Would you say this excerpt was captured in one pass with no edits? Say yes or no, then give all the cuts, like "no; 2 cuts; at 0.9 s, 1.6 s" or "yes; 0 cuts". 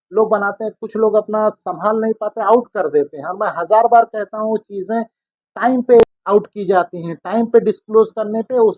yes; 0 cuts